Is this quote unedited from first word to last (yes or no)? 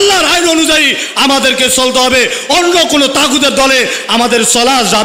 yes